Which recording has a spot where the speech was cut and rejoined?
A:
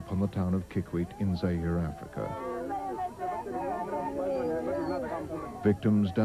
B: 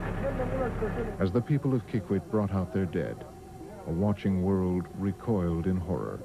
B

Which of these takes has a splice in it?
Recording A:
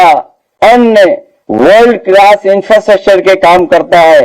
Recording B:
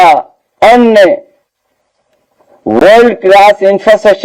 A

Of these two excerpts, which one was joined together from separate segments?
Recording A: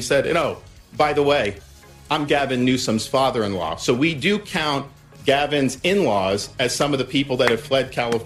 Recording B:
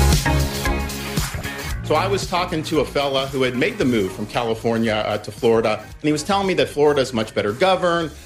B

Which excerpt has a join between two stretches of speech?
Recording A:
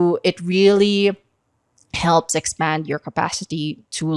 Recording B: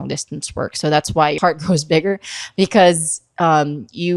B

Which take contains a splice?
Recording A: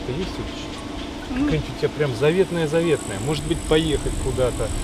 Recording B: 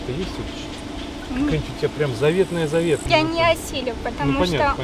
B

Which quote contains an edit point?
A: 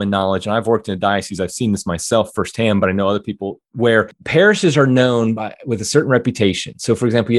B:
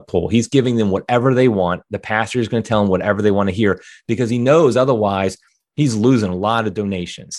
A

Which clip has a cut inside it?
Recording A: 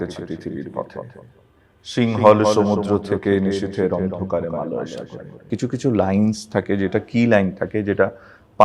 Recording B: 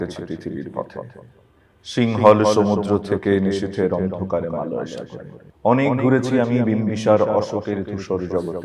A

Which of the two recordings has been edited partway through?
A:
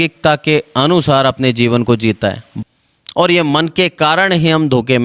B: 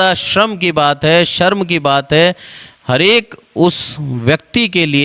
A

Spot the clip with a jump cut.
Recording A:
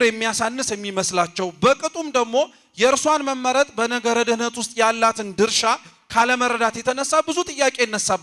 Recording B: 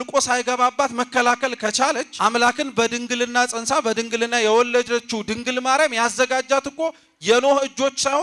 B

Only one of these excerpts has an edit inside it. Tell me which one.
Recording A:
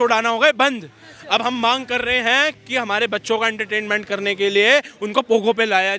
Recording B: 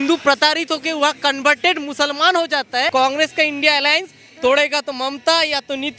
B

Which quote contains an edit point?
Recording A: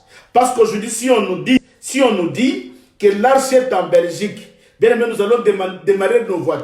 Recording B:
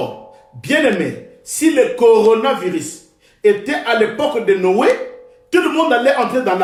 A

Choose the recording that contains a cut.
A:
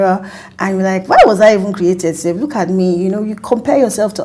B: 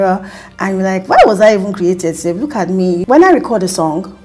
B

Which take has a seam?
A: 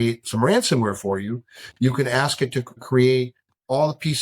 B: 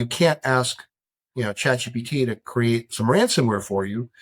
A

